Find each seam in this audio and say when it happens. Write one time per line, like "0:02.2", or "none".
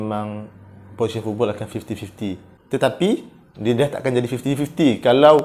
0:02.5